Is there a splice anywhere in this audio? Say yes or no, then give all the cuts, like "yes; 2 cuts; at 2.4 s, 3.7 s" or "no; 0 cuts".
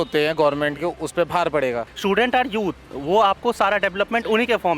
yes; 1 cut; at 1.9 s